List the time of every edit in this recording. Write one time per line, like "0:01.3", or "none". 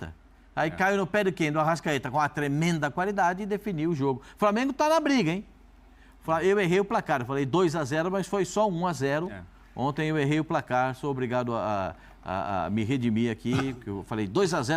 none